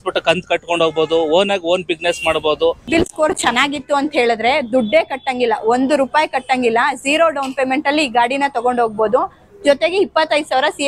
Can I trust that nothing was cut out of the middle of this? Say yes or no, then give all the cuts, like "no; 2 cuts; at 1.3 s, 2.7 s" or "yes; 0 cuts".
no; 1 cut; at 2.8 s